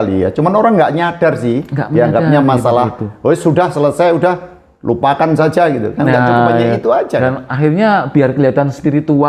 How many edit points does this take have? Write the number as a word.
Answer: zero